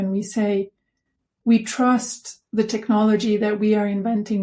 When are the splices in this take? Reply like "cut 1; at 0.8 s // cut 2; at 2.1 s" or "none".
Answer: none